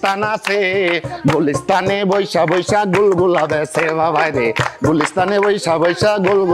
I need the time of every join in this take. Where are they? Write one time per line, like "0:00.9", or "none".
none